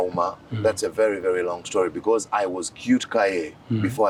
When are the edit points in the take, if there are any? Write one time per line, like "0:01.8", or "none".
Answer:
none